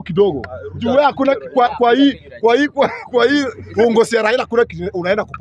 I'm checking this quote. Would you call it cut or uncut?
uncut